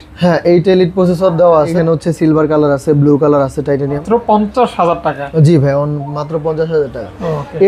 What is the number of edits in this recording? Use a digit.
2